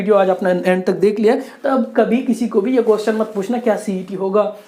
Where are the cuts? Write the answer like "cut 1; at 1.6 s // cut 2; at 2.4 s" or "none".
none